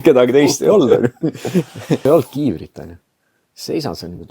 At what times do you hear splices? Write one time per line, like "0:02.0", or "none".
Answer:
0:02.0